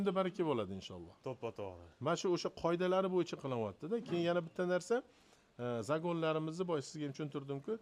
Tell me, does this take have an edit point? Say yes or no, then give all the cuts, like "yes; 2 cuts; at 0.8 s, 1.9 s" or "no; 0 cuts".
no; 0 cuts